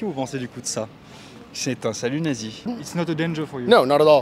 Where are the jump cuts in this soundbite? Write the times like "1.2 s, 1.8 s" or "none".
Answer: 2.7 s